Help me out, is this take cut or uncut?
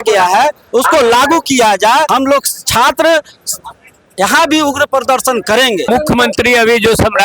cut